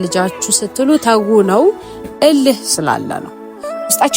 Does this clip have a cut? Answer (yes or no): yes